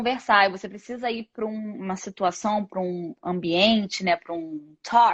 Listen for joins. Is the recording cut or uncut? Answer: uncut